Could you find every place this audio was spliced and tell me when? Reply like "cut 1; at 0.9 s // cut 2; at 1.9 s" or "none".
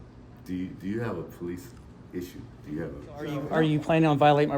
cut 1; at 3.4 s

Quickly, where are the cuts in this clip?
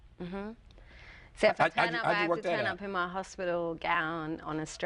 none

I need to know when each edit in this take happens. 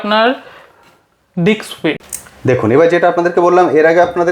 cut 1; at 2.0 s

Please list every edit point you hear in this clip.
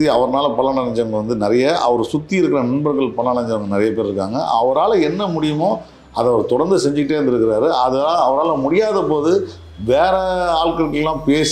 none

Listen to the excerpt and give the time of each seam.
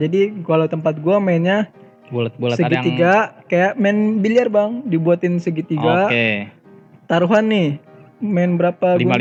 none

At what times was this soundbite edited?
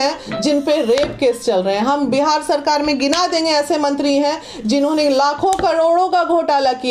none

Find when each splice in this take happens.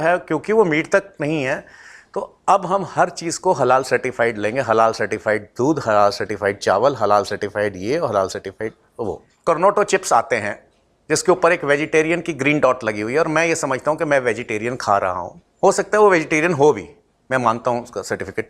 cut 1; at 9.3 s

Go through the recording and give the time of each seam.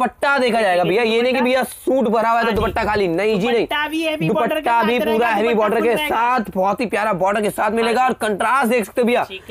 none

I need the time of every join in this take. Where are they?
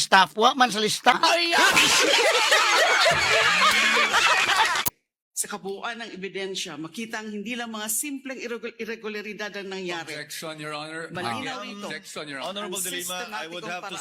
cut 1; at 1.2 s // cut 2; at 4.8 s

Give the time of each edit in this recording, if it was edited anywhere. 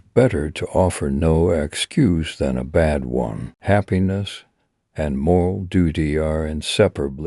cut 1; at 3.5 s

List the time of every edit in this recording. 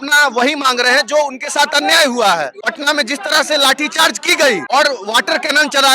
cut 1; at 2.6 s // cut 2; at 4.6 s

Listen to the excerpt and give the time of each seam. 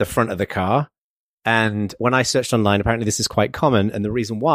cut 1; at 1.9 s

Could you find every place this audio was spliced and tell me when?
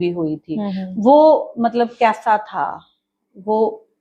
none

